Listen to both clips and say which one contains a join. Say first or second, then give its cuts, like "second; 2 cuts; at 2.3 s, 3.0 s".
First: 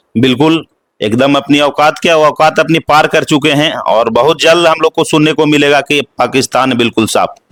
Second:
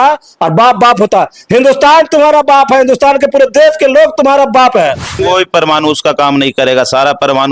second; 1 cut; at 5.2 s